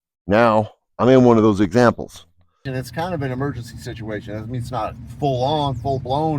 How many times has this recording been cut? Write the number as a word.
one